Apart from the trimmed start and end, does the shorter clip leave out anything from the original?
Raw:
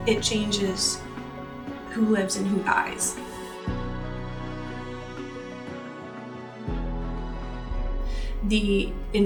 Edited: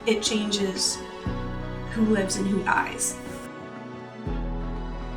yes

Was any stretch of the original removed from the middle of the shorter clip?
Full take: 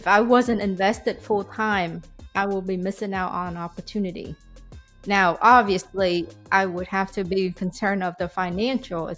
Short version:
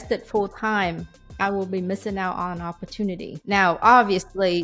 yes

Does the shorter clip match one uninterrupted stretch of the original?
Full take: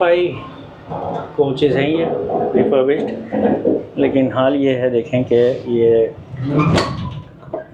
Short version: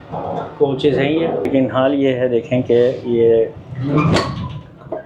no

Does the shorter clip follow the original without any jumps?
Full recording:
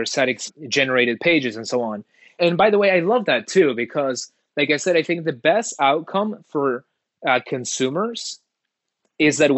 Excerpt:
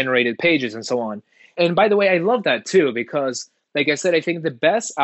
yes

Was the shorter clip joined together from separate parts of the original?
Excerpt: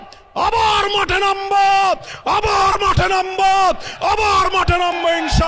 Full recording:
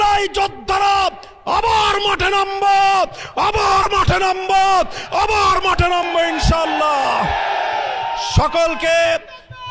no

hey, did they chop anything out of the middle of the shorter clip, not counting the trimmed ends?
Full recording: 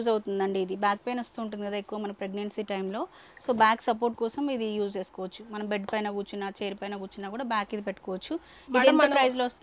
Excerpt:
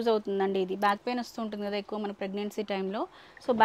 no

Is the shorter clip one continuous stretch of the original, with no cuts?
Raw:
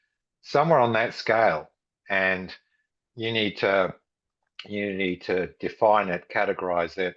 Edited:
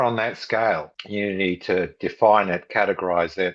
no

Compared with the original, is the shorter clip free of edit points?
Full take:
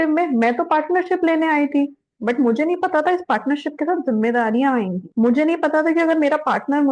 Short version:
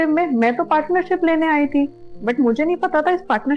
yes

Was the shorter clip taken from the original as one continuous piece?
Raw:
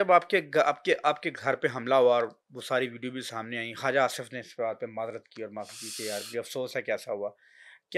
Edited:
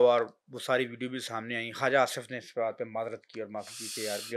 yes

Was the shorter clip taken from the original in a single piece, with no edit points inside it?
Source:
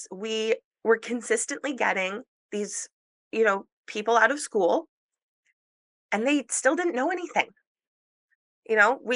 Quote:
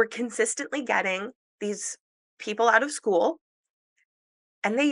no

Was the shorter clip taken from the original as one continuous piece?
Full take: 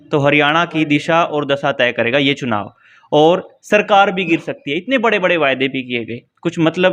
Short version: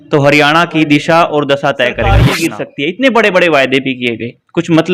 no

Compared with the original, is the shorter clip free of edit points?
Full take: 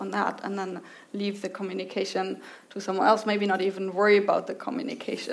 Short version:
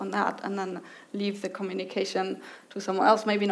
yes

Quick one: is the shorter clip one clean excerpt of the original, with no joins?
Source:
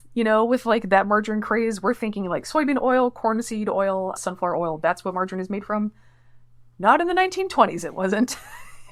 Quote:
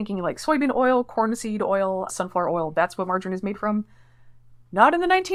yes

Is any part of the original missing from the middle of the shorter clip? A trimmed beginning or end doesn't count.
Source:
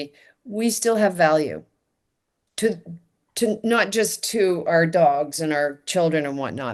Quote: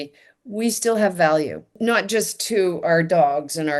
yes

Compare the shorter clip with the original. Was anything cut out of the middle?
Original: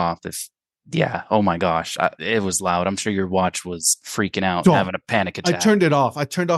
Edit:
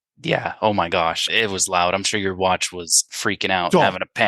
yes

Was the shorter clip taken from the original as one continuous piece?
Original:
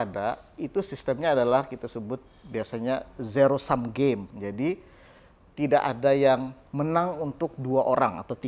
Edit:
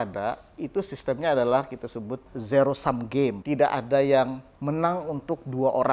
no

